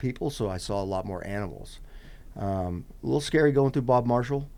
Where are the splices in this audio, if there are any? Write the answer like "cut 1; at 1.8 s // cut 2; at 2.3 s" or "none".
none